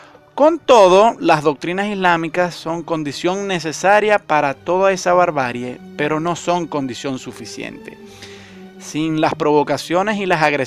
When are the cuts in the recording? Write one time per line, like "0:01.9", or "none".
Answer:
0:07.0